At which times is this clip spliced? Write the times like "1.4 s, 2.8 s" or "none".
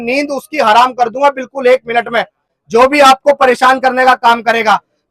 none